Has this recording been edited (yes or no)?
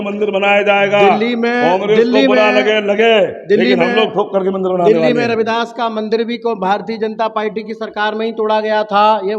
no